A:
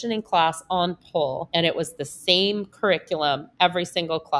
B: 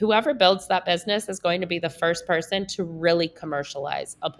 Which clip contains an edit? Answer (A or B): A